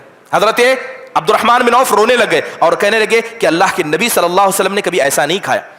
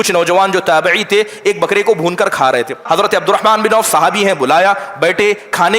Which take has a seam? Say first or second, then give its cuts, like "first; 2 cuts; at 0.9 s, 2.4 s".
second; 1 cut; at 2.8 s